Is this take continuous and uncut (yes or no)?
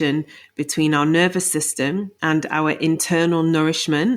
no